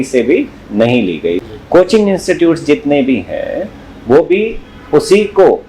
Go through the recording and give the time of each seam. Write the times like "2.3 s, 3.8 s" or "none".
1.4 s

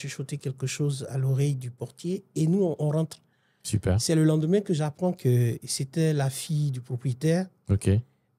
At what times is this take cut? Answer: none

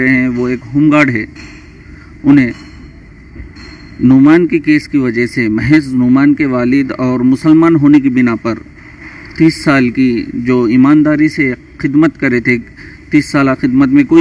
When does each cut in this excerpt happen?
none

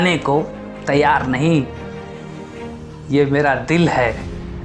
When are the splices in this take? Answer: none

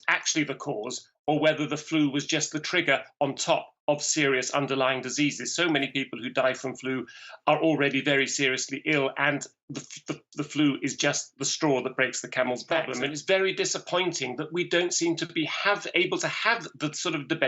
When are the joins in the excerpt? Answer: 12.9 s

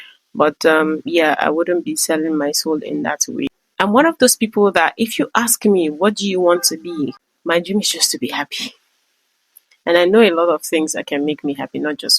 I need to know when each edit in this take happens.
3.5 s, 7.3 s

